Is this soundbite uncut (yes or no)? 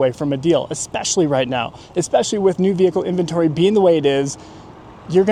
yes